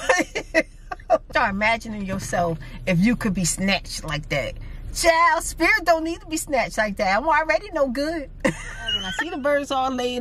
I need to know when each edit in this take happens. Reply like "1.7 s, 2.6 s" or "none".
1.3 s, 9.1 s